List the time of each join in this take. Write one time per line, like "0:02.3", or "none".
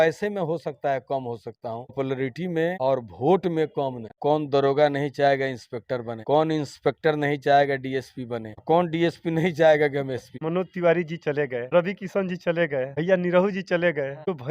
0:02.8
0:04.1
0:10.4